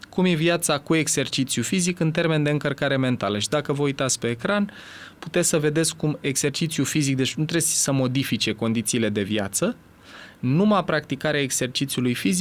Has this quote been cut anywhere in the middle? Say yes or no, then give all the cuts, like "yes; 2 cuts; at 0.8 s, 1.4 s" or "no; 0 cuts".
no; 0 cuts